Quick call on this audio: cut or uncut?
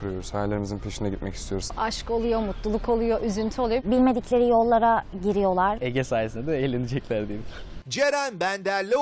uncut